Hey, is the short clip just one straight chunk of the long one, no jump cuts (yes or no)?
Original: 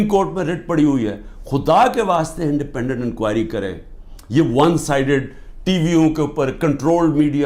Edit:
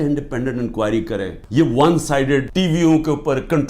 no